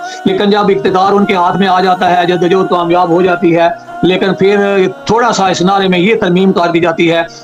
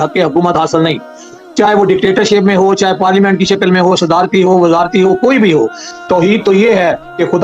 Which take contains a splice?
second; 1 cut; at 5.8 s

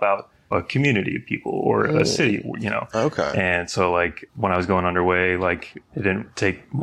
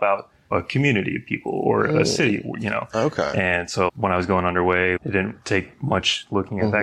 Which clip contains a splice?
second; 2 cuts; at 3.9 s, 5.0 s

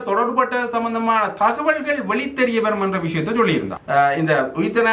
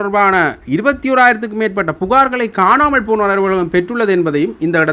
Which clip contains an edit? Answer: first; 1 cut; at 3.8 s

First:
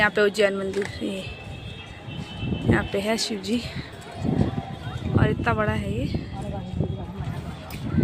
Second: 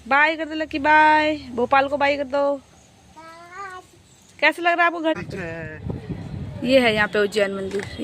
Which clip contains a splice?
second; 1 cut; at 5.2 s

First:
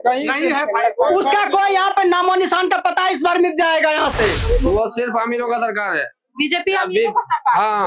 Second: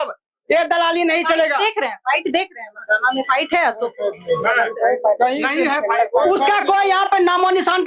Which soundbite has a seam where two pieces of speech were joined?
first; 1 cut; at 4.4 s

